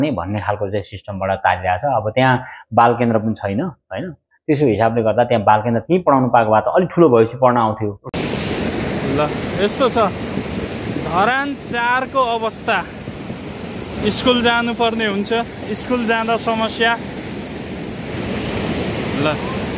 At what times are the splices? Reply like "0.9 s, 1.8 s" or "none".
8.1 s